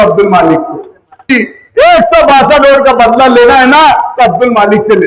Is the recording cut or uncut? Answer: cut